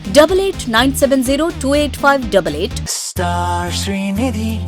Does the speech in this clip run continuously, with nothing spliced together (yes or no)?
no